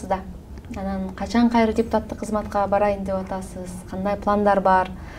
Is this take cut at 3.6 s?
no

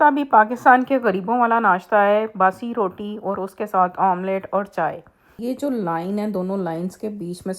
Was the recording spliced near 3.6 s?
no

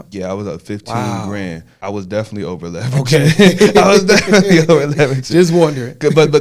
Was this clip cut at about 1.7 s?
yes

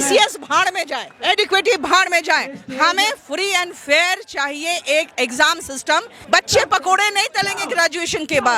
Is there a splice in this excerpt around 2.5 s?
no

